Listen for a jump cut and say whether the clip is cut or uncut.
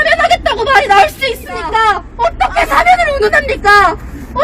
cut